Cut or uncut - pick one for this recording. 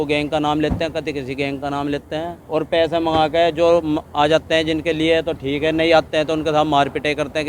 cut